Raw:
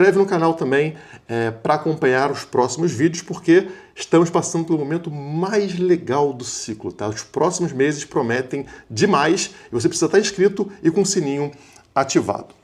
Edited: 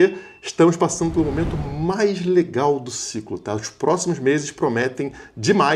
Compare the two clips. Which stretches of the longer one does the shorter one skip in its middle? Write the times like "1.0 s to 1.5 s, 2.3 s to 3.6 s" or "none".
none